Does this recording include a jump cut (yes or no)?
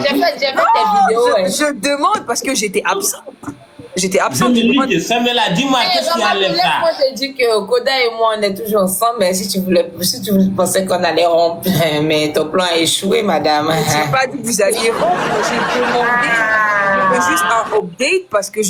no